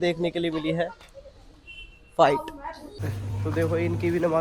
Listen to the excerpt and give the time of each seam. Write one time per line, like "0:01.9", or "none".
0:02.8